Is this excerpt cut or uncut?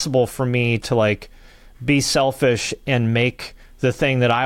uncut